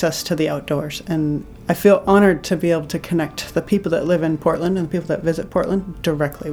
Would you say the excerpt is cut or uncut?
cut